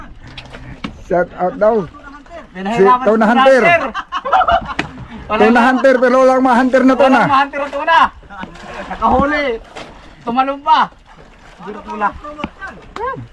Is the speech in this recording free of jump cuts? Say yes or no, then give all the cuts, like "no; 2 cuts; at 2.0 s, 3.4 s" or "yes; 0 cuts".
yes; 0 cuts